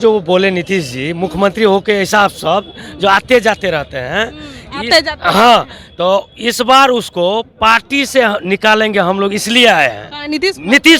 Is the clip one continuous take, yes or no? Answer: yes